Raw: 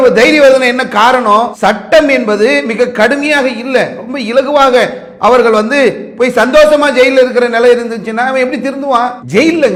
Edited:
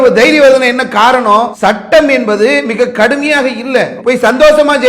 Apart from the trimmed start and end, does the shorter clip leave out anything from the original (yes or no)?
yes